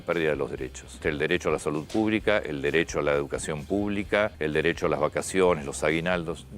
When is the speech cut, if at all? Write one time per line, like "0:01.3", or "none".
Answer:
0:01.0
0:04.4